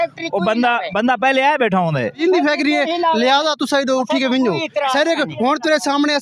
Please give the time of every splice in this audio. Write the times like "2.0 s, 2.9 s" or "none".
2.2 s

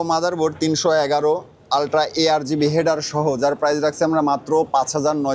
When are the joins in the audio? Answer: none

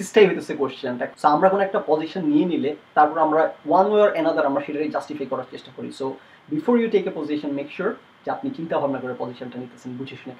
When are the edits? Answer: 1.0 s

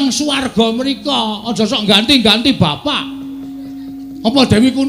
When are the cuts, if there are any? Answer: none

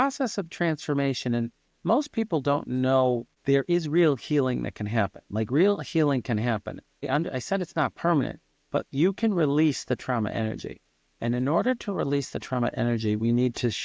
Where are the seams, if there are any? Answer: 3.3 s, 6.9 s

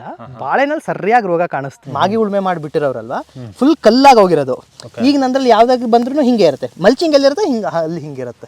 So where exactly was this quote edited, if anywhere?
1.8 s

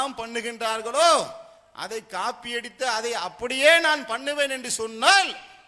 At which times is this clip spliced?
none

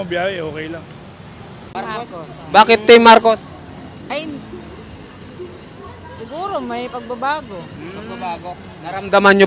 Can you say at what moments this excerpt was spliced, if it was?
1.7 s

